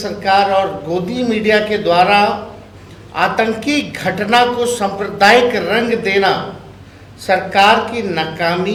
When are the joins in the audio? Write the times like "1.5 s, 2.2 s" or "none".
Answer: none